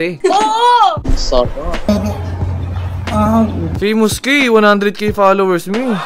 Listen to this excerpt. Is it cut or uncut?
cut